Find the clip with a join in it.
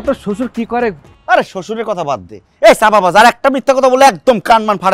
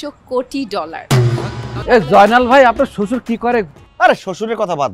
second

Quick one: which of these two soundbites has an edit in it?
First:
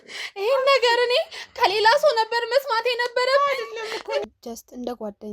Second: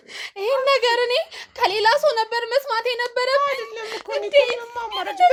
first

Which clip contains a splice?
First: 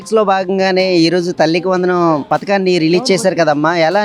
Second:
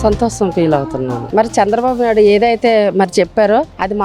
second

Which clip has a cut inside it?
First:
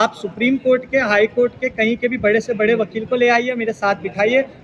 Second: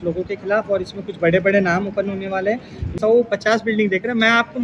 second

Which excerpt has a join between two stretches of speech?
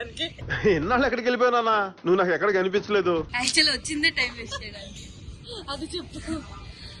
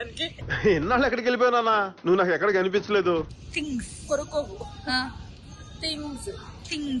second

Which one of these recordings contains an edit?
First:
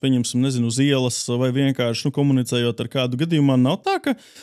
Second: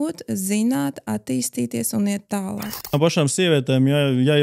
second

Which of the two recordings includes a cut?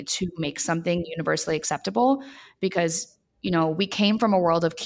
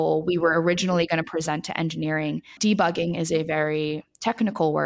second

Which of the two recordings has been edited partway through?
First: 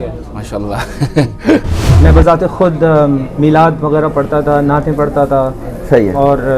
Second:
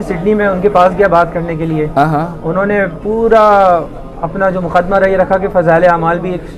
first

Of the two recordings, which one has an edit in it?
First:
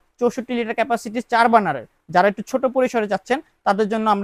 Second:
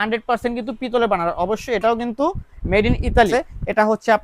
second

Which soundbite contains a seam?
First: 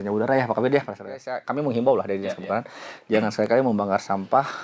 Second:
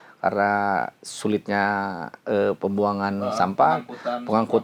first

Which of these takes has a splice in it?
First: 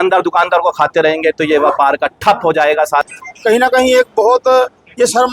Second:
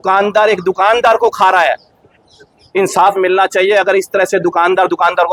first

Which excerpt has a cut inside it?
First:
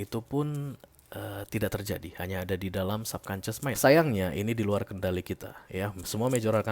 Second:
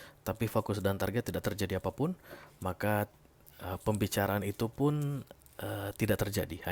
first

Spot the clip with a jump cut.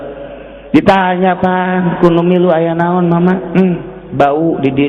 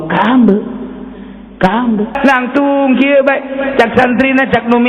second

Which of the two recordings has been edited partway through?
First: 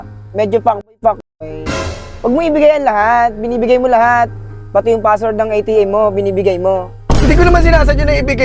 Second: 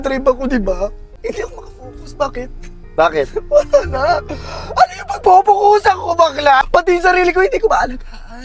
second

